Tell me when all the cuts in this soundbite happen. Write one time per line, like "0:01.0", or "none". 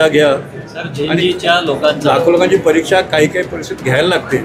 none